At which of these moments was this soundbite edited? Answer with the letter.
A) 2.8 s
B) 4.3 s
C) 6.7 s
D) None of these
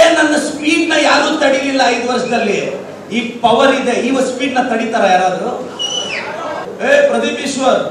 C